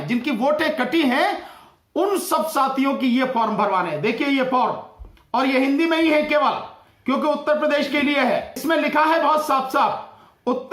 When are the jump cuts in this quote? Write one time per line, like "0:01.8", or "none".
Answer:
0:08.6